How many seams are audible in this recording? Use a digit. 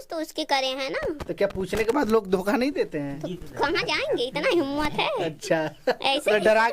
0